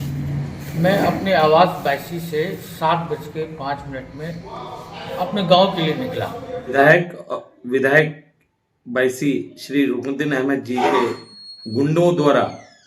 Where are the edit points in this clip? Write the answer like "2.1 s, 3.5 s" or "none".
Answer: 6.7 s